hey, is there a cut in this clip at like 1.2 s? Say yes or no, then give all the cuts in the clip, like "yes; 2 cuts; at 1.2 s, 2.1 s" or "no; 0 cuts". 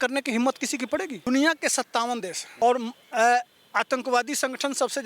yes; 2 cuts; at 1.2 s, 2.4 s